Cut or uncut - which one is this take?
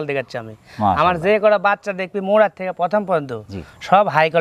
uncut